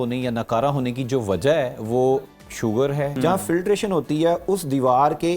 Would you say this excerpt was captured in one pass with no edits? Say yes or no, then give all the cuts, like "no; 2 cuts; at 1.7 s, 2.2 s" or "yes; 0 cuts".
no; 1 cut; at 3.2 s